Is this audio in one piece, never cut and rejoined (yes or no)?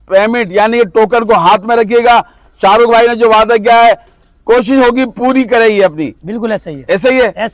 yes